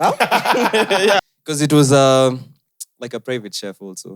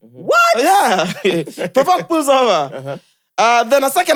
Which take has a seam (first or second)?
first